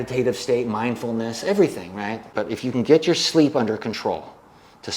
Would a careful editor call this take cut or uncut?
cut